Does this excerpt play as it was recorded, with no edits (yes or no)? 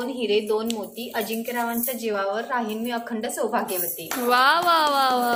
yes